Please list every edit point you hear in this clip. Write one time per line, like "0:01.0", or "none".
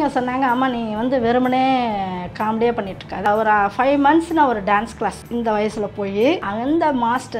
0:03.3
0:05.2
0:06.4